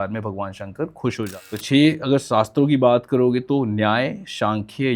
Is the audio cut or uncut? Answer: cut